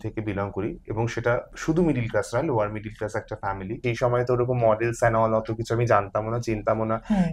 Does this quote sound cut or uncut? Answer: cut